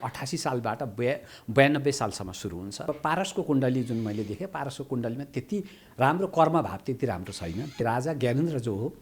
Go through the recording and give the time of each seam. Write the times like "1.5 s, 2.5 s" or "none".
2.9 s, 7.8 s